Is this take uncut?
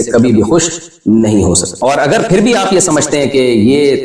no; 1 cut; at 1.7 s

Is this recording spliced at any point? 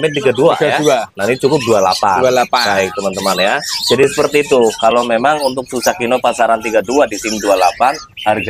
no; 0 cuts

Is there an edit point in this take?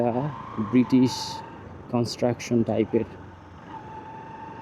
no; 0 cuts

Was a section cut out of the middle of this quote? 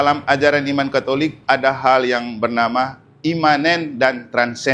no; 0 cuts

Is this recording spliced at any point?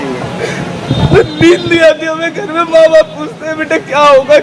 no; 0 cuts

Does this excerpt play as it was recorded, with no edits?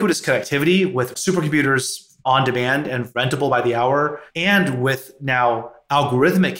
no; 1 cut; at 1.2 s

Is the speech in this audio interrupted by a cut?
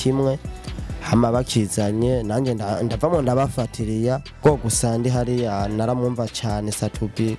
yes; 1 cut; at 4.4 s

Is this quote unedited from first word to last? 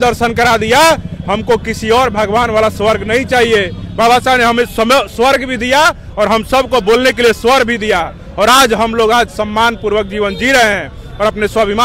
yes; 0 cuts

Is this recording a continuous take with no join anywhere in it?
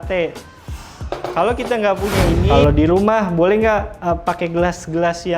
no; 1 cut; at 2.4 s

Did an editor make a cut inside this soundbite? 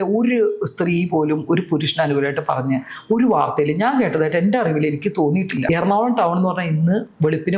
yes; 1 cut; at 5.6 s

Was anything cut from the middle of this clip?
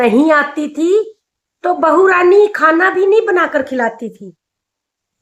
no; 0 cuts

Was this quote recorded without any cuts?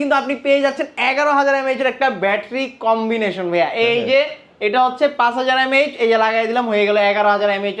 yes; 0 cuts

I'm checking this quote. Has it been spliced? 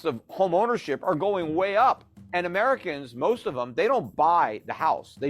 yes; 1 cut; at 2.1 s

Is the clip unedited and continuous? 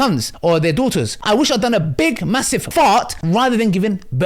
no; 2 cuts; at 1.2 s, 3.2 s

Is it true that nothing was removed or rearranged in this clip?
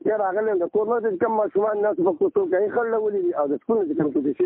yes; 0 cuts

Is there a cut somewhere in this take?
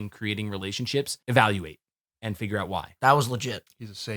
yes; 2 cuts; at 1.2 s, 2.9 s

